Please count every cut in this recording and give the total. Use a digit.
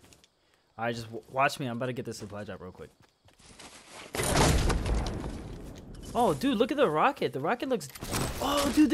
0